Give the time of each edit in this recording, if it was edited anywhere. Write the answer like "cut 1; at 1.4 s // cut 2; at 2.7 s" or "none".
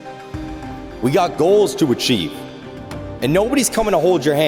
cut 1; at 1.0 s